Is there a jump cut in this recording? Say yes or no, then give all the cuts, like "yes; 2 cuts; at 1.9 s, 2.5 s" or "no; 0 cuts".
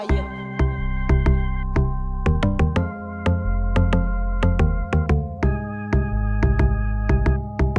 no; 0 cuts